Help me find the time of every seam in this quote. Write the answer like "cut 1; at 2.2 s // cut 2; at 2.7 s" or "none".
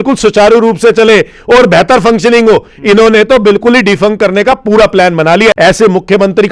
cut 1; at 5.5 s